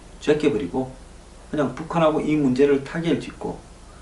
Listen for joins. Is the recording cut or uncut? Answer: cut